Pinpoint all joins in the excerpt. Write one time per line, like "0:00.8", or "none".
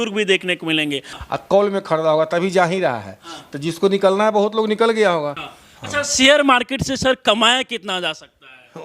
0:01.1
0:05.4